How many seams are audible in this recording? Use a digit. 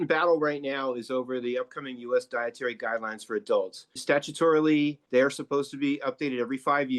2